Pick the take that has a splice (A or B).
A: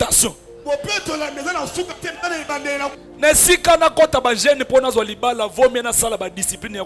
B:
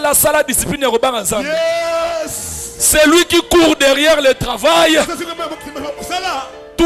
A